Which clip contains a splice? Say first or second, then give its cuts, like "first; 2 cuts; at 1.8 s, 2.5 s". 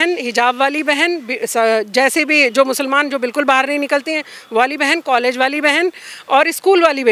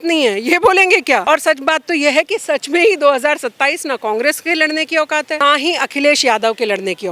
second; 2 cuts; at 1.2 s, 5.4 s